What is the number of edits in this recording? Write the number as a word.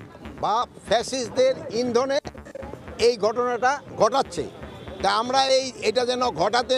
one